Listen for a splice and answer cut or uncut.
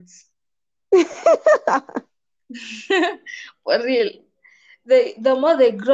uncut